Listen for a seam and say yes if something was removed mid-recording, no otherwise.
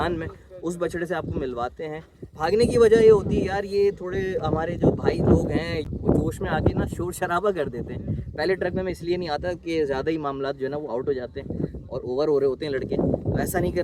no